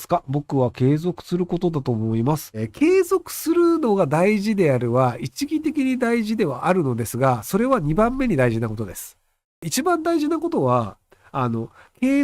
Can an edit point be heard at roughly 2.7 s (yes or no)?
yes